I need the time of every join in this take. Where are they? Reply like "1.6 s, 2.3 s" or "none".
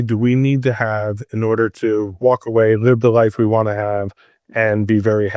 none